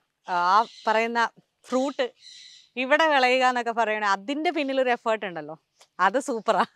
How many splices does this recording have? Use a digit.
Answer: 0